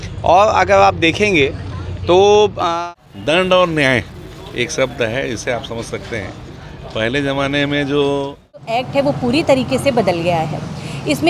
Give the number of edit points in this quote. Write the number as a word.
two